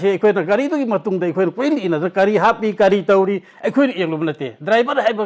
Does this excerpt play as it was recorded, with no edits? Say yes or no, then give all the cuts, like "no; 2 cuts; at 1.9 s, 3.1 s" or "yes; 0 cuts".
yes; 0 cuts